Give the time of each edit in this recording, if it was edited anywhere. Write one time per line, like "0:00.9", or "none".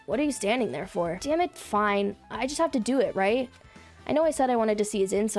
0:01.2